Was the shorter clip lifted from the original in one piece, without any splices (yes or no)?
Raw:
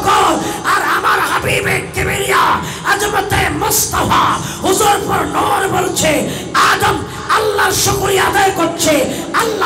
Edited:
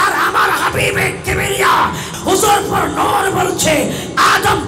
no